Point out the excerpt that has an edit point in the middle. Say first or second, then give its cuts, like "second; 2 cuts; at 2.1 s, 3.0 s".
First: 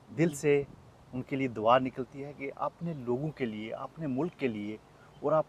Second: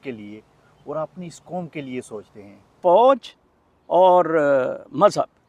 second; 1 cut; at 2.7 s